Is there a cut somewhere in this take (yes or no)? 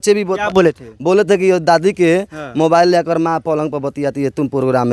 no